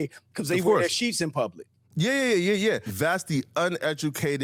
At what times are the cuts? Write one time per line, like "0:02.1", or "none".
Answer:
none